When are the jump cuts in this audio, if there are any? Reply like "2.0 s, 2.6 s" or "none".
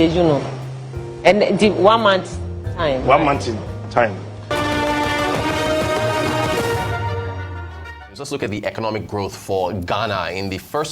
4.4 s

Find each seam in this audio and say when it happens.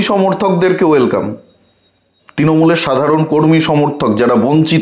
none

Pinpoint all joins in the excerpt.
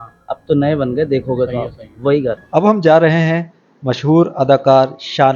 2.4 s

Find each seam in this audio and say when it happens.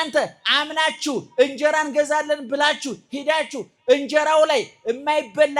none

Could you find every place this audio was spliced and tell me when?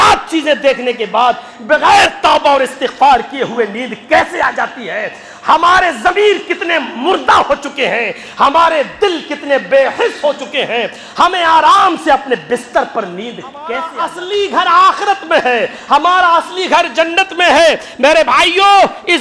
13.9 s

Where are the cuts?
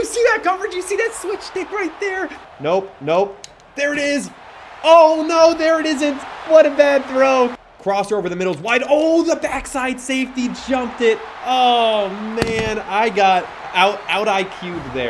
2.4 s, 7.5 s, 13.6 s

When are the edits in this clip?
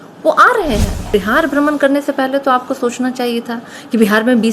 1.1 s

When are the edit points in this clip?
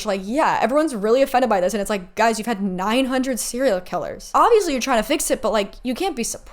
4.2 s

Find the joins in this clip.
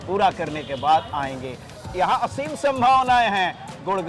1.8 s

